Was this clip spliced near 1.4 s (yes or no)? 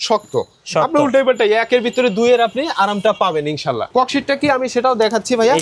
no